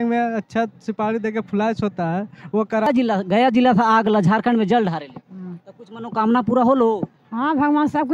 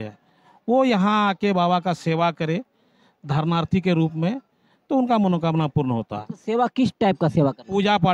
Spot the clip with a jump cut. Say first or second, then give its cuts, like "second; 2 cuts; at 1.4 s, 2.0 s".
first; 1 cut; at 2.9 s